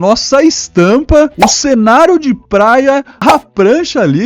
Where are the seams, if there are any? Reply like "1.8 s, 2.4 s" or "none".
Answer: 1.5 s, 3.3 s